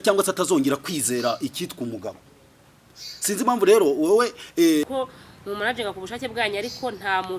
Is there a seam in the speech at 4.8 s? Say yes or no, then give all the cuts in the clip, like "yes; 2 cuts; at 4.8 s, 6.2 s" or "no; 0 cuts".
yes; 1 cut; at 4.8 s